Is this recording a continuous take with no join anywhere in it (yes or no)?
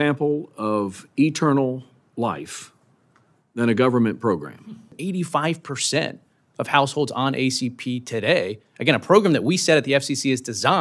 no